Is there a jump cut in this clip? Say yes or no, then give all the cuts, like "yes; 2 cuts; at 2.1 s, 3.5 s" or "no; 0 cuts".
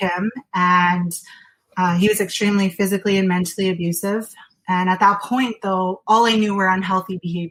no; 0 cuts